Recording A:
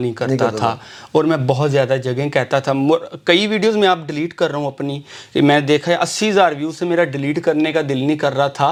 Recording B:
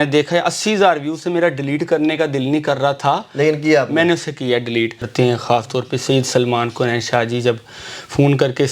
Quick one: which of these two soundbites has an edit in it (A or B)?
B